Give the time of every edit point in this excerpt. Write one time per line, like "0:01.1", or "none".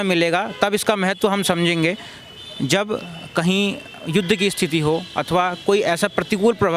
none